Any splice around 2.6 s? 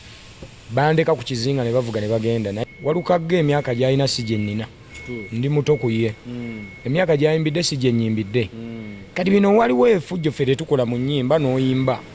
yes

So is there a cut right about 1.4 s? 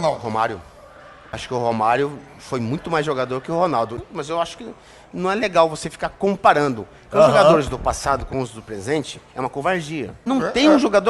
yes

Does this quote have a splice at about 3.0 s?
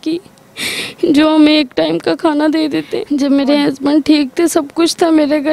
yes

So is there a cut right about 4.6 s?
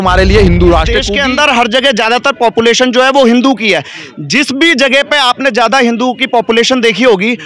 no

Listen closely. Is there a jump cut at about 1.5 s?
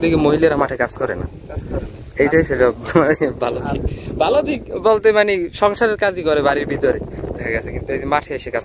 no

